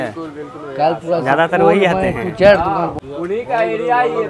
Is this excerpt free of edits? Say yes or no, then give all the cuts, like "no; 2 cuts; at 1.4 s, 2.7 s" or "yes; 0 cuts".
no; 1 cut; at 3.0 s